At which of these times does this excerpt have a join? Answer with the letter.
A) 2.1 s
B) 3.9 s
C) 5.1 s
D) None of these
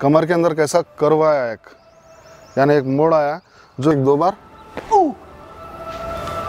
B